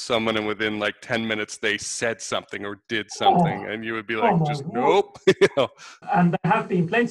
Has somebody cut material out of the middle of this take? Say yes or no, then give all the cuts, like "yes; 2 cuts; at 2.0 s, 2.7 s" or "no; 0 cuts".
yes; 1 cut; at 6.0 s